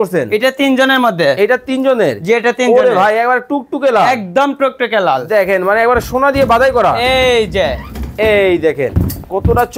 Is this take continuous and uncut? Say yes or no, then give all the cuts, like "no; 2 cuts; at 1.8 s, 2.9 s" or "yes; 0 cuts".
yes; 0 cuts